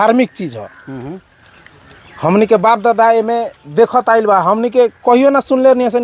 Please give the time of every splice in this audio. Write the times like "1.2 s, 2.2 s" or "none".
none